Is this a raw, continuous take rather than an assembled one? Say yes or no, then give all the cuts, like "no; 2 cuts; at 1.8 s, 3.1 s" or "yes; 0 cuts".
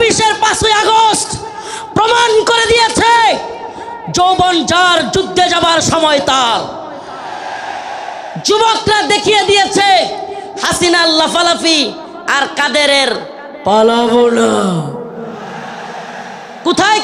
yes; 0 cuts